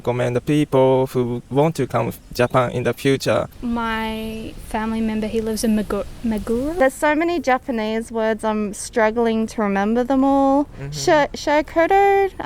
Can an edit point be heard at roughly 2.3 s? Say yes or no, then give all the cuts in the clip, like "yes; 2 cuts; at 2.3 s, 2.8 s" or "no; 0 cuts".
no; 1 cut; at 6.7 s